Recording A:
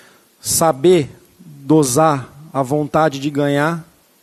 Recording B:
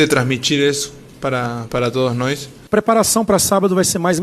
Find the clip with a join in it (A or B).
B